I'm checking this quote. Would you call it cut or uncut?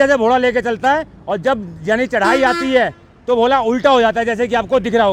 uncut